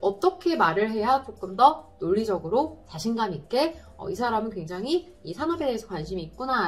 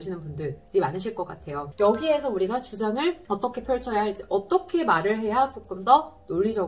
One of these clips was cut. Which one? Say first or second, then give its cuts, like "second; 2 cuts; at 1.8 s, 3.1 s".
second; 2 cuts; at 1.6 s, 3.2 s